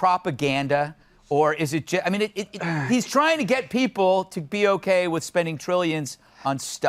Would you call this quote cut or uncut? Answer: uncut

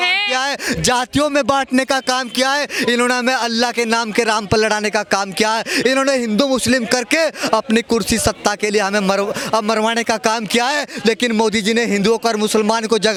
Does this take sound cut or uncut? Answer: uncut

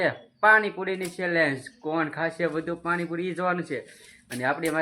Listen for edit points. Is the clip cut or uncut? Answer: cut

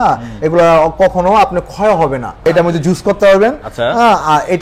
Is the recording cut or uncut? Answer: cut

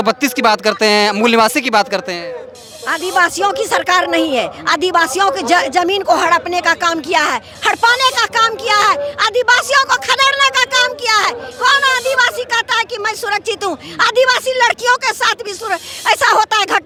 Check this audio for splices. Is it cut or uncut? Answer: uncut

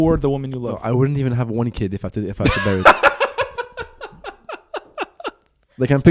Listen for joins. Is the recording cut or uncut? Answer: uncut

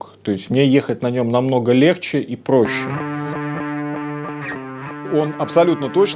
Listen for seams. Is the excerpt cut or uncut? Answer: cut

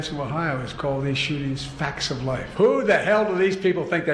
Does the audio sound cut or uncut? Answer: cut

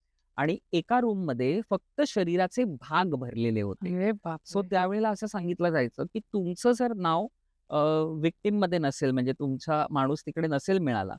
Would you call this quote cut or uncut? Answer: uncut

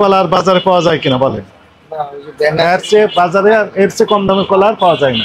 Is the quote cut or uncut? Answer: uncut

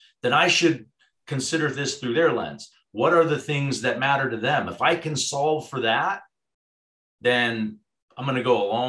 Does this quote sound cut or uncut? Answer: uncut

